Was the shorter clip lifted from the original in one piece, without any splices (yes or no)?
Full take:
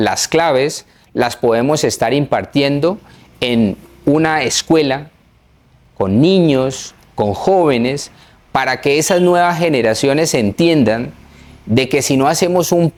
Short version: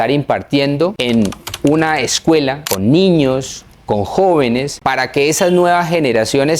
no